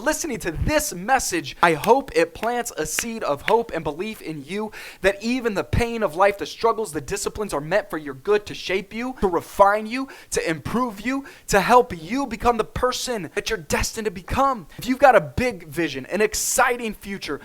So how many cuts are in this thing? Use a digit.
4